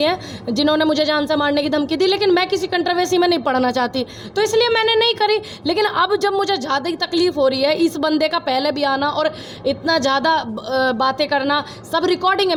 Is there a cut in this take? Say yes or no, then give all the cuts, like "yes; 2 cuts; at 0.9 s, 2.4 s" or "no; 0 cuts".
no; 0 cuts